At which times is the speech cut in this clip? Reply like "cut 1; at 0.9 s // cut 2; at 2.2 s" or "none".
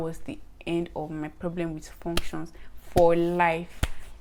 none